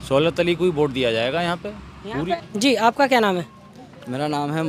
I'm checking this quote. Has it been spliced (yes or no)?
no